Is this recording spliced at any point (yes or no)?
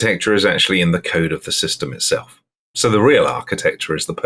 no